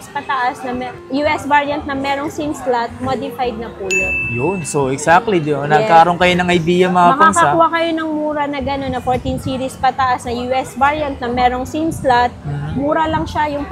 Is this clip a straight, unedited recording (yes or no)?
yes